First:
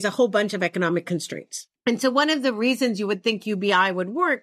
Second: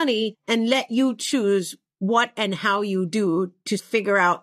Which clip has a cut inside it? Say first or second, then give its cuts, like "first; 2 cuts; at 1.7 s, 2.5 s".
first; 1 cut; at 1.6 s